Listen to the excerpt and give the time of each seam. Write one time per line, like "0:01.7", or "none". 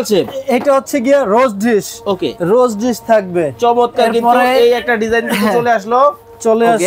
none